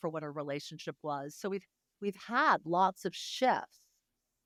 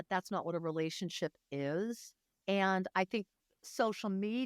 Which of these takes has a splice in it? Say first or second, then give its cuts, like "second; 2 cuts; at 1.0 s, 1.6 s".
second; 1 cut; at 2.3 s